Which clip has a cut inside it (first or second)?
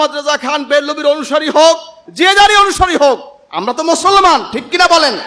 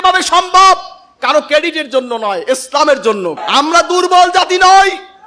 second